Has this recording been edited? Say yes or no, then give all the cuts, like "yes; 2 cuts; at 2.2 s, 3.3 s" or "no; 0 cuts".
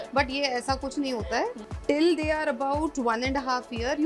yes; 1 cut; at 1.6 s